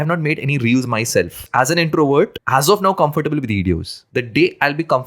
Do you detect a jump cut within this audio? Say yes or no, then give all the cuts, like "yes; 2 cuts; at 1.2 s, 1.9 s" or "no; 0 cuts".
yes; 3 cuts; at 1.4 s, 2.4 s, 3.9 s